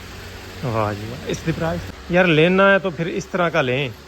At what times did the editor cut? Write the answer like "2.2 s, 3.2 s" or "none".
1.9 s